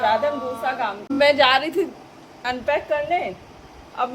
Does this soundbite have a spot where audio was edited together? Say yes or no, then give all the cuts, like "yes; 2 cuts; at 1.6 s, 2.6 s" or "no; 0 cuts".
yes; 1 cut; at 1.1 s